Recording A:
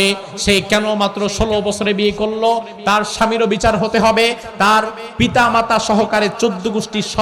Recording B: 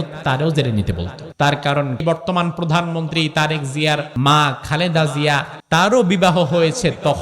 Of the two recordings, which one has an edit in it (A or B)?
B